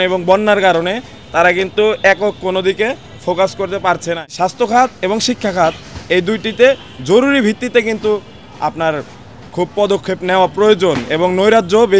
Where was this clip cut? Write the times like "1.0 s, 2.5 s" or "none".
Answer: 4.3 s